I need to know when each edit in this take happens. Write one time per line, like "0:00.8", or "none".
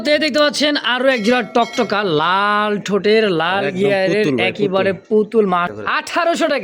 0:05.7